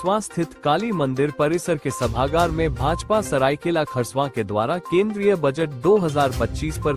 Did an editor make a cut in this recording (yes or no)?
no